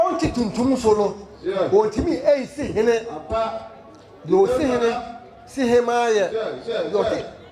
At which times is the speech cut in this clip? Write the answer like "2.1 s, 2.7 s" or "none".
none

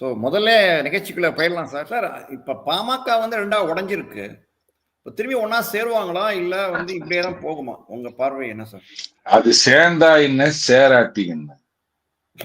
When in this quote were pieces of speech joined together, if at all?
1.8 s

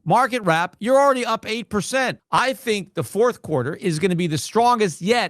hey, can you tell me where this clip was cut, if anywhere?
2.2 s

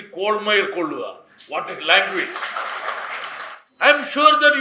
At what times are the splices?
3.6 s

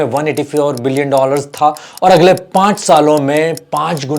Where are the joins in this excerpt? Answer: 1.9 s

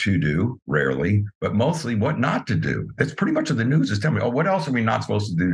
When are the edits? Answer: none

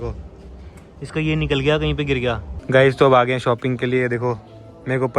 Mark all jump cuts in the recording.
2.5 s

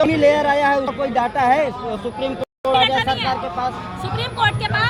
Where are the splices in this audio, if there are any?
none

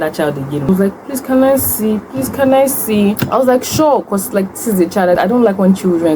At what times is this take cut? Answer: 0.7 s, 3.2 s, 5.2 s

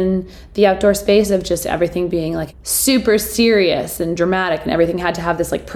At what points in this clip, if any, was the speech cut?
2.6 s

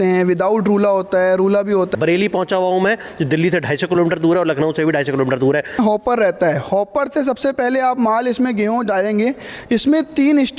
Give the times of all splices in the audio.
1.9 s, 5.8 s

